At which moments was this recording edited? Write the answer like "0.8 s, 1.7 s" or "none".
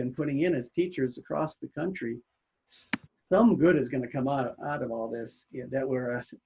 none